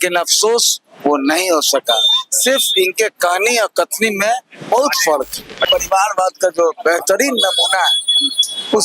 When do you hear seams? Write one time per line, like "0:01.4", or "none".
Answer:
0:05.7